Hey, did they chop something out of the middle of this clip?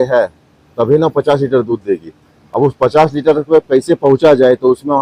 no; 0 cuts

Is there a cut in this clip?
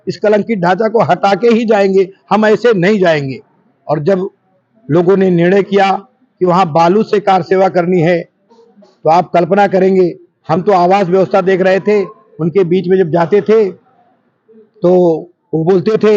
no; 0 cuts

